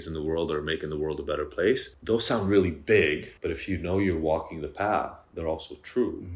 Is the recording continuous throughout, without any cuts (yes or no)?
no